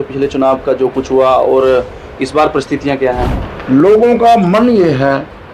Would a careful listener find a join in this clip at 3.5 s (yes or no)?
yes